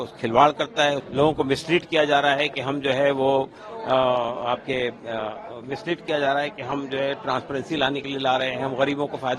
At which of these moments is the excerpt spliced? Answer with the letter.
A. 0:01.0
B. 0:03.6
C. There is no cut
A